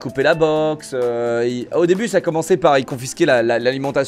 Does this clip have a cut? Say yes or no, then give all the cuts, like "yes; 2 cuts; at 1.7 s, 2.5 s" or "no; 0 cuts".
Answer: no; 0 cuts